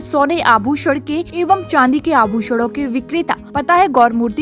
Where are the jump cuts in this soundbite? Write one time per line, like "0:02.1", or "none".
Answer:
0:01.3
0:03.4